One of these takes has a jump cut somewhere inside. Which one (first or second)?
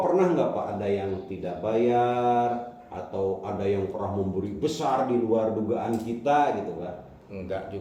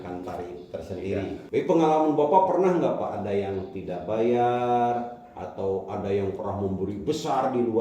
second